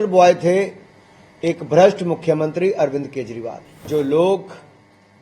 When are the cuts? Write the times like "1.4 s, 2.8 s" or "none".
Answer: 3.9 s